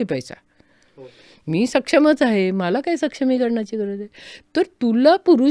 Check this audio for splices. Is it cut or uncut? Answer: uncut